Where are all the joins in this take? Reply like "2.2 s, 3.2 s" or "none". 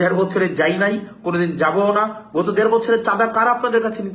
none